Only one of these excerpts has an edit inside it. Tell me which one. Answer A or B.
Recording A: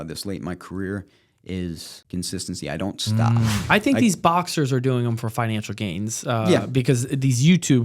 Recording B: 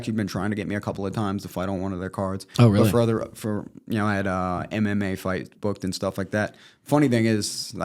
A